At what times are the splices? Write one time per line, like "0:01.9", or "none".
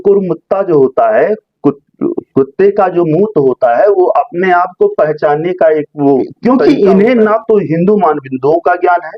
0:06.3